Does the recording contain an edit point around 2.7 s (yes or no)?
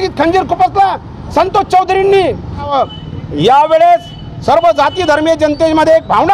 yes